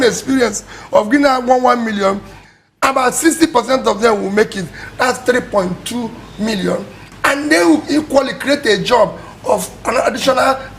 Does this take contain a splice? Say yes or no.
no